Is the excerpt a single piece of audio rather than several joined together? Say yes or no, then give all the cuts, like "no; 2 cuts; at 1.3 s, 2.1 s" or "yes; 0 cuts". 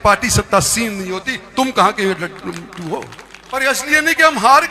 no; 1 cut; at 3.6 s